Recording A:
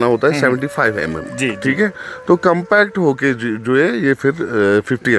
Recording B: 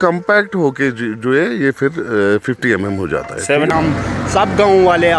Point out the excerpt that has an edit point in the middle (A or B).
B